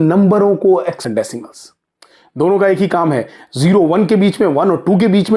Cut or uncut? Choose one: cut